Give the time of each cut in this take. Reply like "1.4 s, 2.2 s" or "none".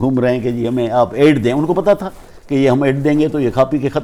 none